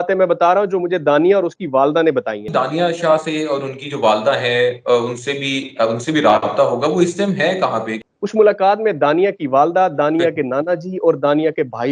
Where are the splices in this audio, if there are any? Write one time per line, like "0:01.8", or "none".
0:02.4
0:07.9